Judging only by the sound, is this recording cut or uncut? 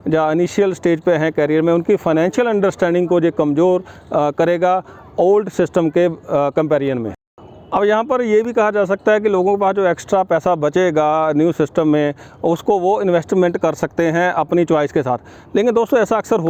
uncut